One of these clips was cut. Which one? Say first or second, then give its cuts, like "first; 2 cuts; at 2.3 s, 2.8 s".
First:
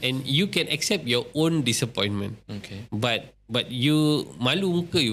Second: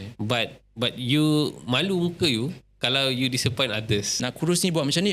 second; 1 cut; at 4.1 s